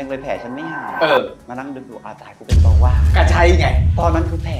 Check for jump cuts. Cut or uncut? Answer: uncut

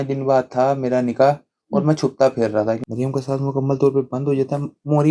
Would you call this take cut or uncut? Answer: cut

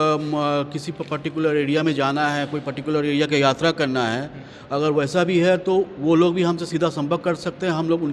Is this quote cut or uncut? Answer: uncut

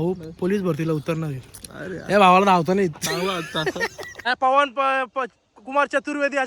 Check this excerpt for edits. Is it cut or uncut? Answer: cut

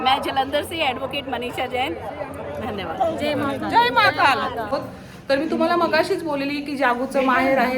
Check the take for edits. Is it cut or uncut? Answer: cut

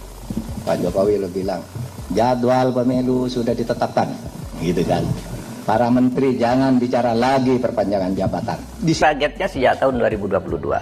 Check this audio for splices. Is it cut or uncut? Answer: cut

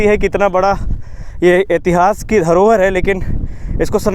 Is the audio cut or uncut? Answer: uncut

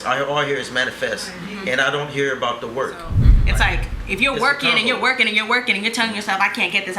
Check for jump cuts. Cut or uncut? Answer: cut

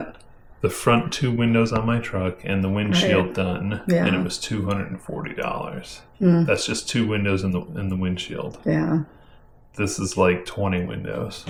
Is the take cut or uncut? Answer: uncut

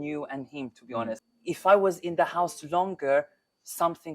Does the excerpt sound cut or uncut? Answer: cut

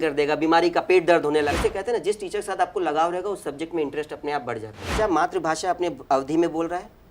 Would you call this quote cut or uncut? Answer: cut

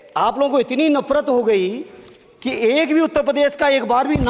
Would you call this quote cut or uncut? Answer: uncut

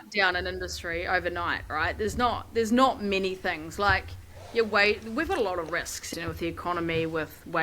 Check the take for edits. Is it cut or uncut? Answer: cut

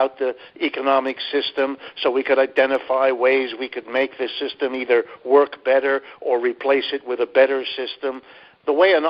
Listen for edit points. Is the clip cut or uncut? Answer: uncut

